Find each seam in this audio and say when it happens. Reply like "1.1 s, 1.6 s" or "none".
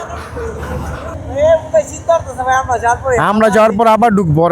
1.1 s